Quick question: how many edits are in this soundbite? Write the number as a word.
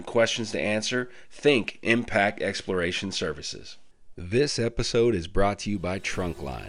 one